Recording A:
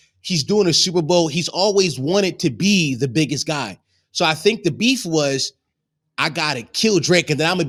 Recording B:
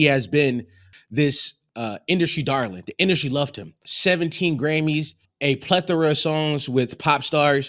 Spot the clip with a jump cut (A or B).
B